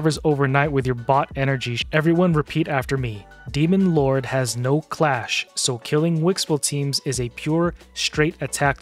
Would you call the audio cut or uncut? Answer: cut